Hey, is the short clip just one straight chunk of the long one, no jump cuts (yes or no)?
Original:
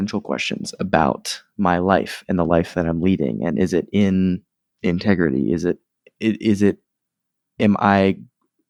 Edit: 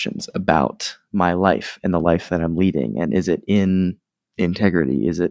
yes